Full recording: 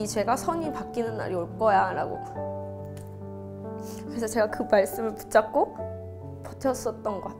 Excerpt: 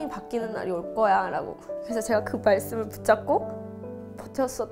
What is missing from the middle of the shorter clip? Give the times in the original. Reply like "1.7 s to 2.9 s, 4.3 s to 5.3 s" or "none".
2.2 s to 3.9 s